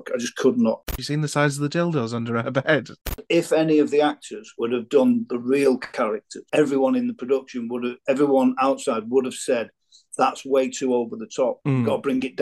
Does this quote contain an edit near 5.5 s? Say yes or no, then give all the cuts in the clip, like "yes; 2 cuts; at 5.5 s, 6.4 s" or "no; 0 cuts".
no; 2 cuts; at 1.0 s, 3.2 s